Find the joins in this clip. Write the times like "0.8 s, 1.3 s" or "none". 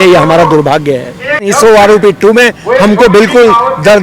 1.4 s